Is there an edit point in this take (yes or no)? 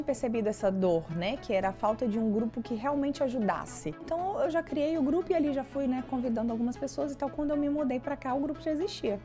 yes